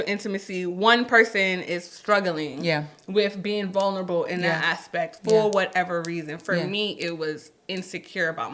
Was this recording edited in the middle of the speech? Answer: no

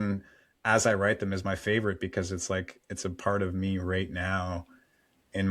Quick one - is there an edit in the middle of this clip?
no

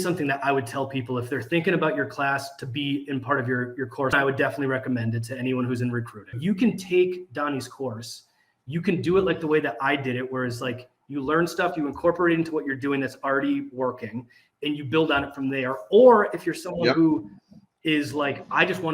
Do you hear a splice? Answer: yes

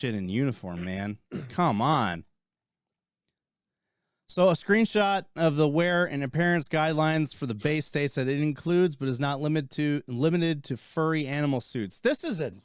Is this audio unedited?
yes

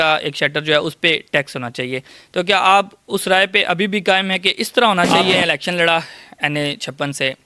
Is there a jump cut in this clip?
yes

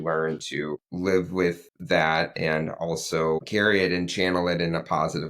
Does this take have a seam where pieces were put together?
yes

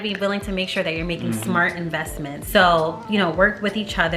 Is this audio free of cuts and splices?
no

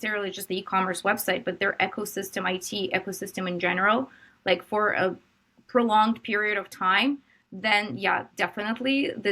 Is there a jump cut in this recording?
no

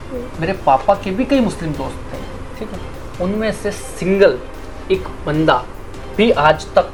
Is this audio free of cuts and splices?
yes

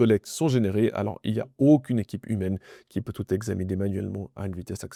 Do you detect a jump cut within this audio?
no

